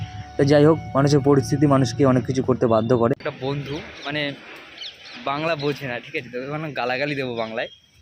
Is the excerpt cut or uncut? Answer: cut